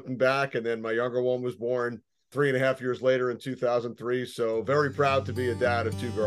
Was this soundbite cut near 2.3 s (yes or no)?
yes